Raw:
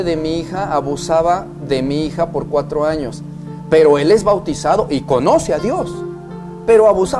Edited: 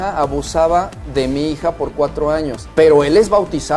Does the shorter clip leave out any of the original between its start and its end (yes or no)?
yes